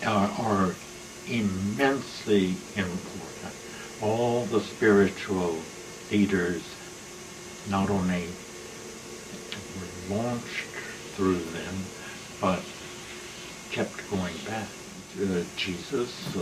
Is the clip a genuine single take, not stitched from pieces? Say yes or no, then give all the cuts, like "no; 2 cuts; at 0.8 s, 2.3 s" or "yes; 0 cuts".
no; 1 cut; at 15.0 s